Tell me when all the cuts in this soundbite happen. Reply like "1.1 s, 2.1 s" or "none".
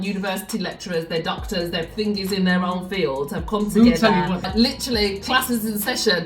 4.5 s